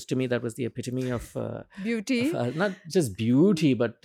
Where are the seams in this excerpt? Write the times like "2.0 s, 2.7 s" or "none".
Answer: none